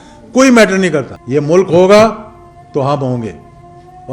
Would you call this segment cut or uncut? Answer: cut